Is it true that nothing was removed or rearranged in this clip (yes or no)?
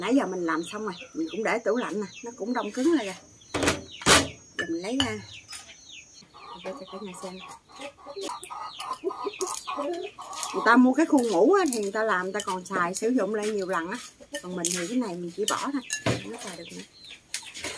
no